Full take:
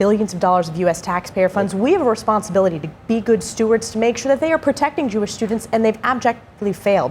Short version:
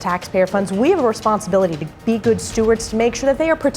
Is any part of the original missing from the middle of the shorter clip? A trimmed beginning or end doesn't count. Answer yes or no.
no